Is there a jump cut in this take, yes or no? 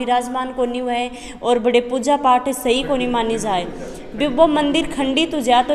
no